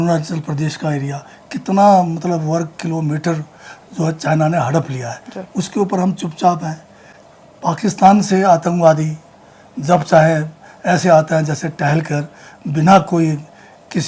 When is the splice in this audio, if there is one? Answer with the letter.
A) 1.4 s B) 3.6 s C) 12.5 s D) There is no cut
D